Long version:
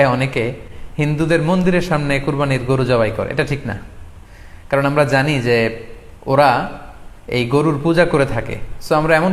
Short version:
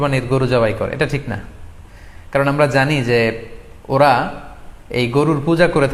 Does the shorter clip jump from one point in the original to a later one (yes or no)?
no